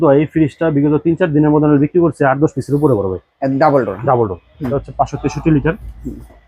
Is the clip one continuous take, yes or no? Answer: no